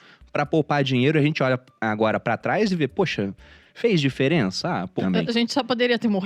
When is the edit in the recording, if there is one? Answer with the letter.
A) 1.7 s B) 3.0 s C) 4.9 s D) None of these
C